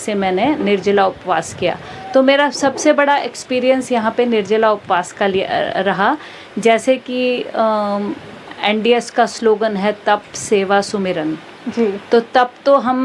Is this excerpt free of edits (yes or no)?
yes